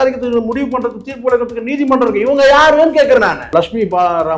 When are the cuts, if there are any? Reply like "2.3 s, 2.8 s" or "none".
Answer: 3.4 s